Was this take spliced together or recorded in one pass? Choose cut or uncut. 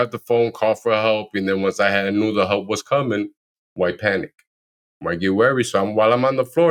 uncut